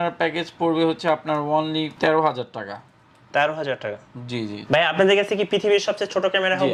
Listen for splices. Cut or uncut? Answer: uncut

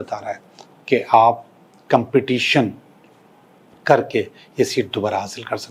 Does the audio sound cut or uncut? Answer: uncut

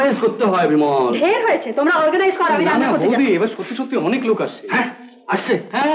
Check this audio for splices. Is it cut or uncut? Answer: uncut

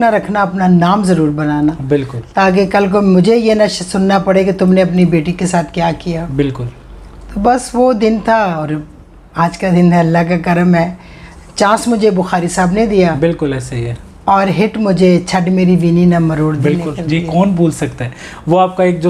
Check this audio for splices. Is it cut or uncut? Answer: uncut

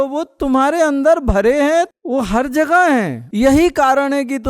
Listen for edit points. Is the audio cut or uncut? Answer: cut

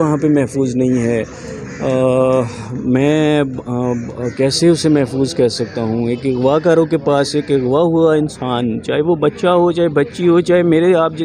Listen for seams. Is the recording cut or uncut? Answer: uncut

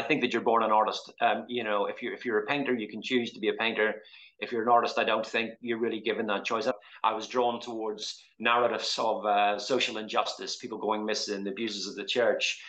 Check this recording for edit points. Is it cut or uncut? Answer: cut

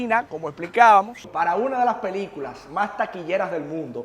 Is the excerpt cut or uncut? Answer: cut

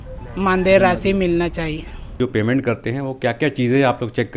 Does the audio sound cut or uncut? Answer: cut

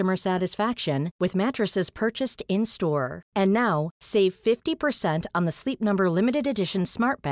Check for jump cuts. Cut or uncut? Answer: uncut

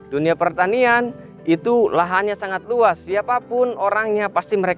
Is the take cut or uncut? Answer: uncut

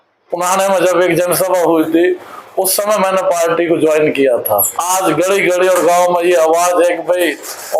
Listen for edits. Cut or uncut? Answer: cut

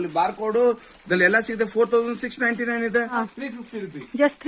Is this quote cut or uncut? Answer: cut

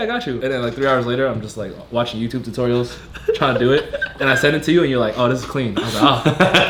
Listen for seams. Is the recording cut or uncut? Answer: uncut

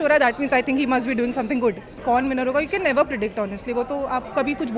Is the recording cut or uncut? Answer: cut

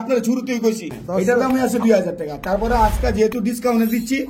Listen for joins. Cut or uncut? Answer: cut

